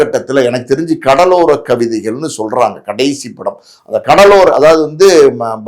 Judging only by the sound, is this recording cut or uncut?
uncut